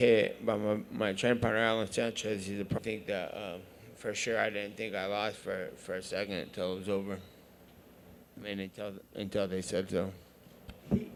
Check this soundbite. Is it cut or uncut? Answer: uncut